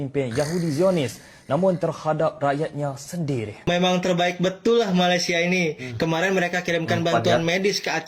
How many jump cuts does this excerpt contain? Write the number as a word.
one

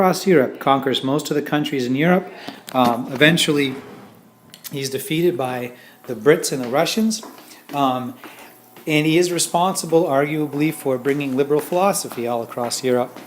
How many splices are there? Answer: one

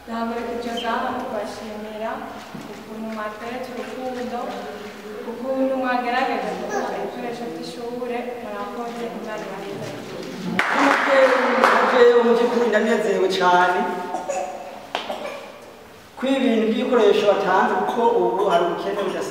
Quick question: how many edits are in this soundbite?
one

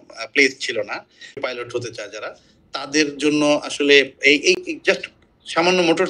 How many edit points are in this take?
one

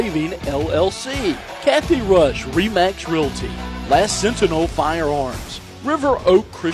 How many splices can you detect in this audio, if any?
one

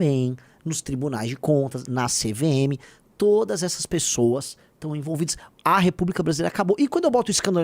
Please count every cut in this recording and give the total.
zero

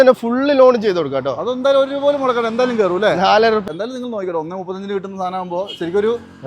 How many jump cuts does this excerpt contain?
one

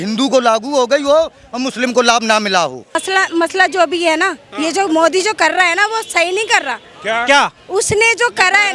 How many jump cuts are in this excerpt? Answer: one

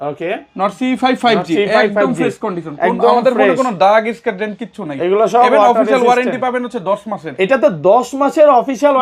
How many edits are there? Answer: zero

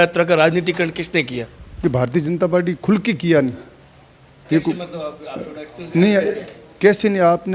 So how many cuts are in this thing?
zero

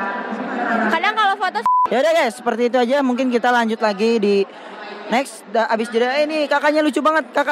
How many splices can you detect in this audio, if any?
one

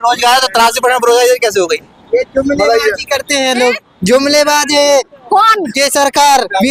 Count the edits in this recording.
zero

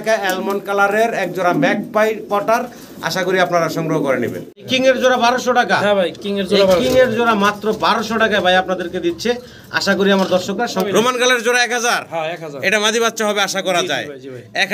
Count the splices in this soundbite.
two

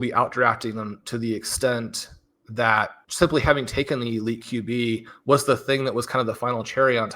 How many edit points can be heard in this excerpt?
one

